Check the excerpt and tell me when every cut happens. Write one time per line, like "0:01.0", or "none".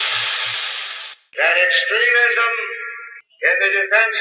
0:01.0

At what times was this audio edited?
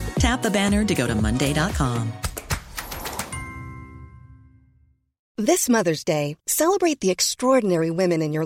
none

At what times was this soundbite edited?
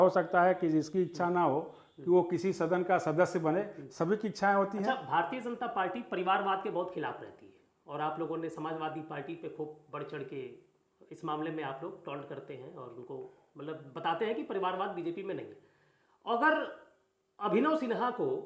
none

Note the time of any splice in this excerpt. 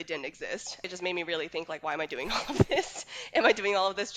none

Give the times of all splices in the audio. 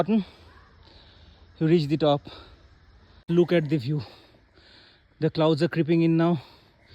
0:03.2

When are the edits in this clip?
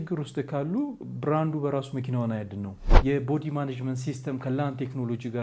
0:02.8

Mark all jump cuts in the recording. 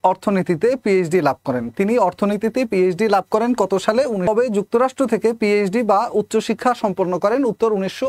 0:04.3

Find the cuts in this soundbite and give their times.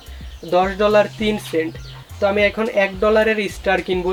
none

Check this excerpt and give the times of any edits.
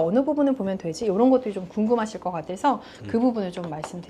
none

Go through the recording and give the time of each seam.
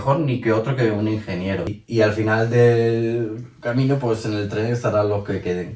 0:01.8

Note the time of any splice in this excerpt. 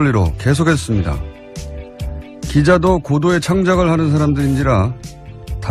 none

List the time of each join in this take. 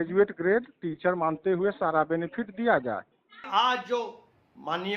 0:03.4

